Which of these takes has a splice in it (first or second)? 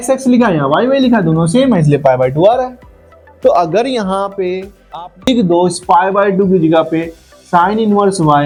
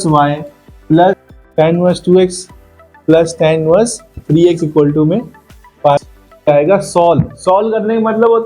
second